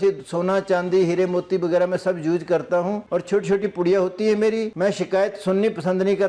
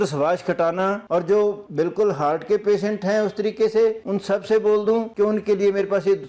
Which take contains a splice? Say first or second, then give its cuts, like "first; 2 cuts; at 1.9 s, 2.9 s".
second; 1 cut; at 1.0 s